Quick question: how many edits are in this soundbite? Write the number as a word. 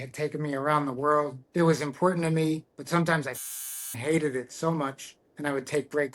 one